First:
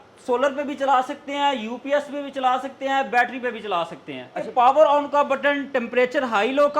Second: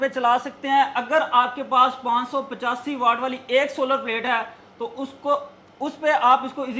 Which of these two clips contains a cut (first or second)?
first